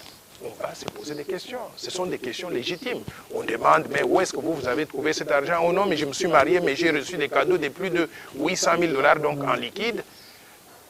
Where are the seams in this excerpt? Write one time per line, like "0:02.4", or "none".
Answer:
none